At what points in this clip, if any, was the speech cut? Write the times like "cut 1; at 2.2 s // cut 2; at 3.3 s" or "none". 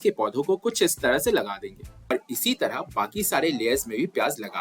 cut 1; at 2.1 s